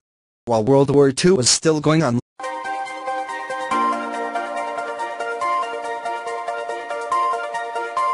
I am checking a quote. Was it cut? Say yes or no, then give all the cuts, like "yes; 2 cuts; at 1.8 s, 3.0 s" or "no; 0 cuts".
no; 0 cuts